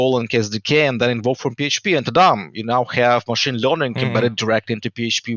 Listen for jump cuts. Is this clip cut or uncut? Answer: uncut